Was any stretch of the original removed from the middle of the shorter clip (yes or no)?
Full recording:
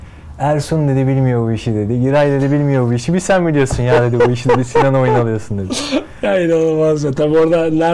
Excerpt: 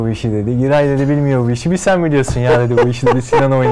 no